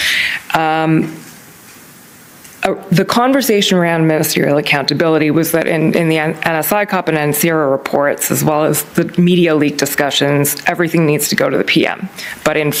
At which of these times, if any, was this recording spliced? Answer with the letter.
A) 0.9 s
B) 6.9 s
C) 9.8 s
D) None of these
D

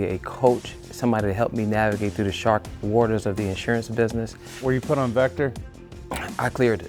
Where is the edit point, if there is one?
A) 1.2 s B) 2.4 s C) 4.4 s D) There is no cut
C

